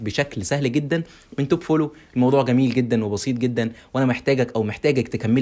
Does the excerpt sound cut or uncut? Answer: uncut